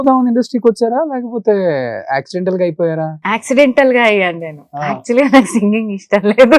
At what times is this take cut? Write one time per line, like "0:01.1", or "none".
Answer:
none